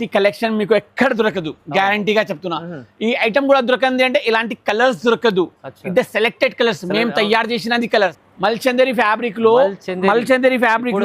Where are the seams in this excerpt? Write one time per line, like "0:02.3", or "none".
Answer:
0:08.2